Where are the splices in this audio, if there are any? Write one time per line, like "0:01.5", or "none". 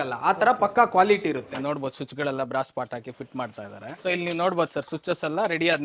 0:01.5
0:03.9